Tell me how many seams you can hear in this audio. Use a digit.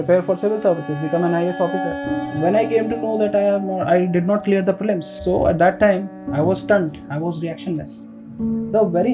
2